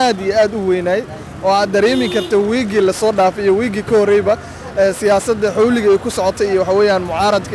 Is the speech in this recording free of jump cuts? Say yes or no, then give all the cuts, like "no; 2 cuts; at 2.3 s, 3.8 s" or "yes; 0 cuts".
yes; 0 cuts